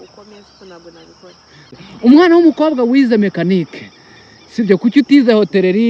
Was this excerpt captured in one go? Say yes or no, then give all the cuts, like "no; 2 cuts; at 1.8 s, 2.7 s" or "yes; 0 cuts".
no; 1 cut; at 1.7 s